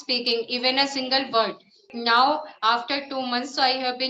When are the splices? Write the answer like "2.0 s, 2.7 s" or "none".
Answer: 1.9 s